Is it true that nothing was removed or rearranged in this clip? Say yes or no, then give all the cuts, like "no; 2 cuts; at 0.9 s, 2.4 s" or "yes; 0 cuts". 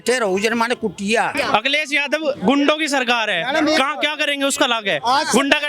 no; 1 cut; at 1.3 s